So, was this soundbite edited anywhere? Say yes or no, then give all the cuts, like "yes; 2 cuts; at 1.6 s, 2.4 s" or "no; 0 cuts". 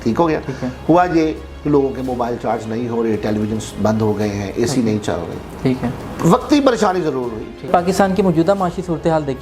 yes; 1 cut; at 7.7 s